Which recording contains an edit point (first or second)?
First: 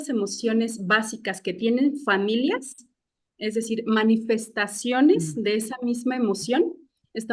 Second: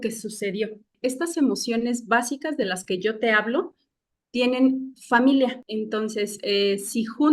second